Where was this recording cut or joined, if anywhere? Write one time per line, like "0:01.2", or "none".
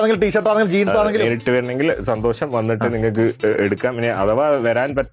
0:01.2